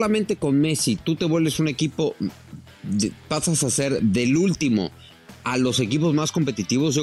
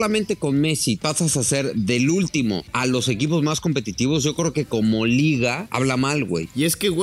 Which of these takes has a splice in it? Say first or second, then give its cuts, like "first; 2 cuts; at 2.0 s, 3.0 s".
second; 3 cuts; at 1.0 s, 2.7 s, 6.1 s